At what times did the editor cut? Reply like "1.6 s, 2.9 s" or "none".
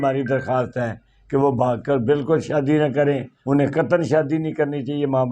3.3 s